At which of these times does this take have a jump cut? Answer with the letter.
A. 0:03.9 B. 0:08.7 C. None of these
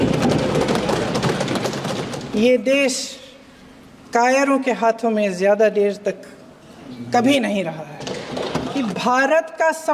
B